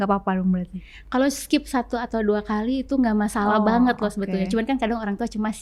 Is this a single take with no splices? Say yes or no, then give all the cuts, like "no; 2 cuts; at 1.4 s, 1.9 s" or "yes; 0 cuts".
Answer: yes; 0 cuts